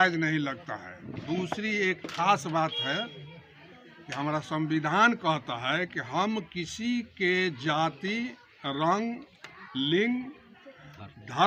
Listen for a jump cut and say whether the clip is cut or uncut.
uncut